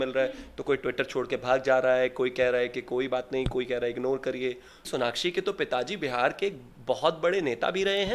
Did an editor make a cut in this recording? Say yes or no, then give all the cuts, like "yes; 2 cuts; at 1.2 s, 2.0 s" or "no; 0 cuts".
yes; 1 cut; at 4.9 s